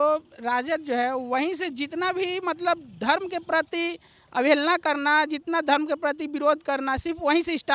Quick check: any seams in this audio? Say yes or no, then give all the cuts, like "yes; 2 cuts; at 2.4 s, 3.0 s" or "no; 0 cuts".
no; 0 cuts